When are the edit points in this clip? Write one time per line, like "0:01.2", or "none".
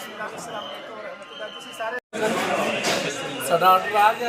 0:02.0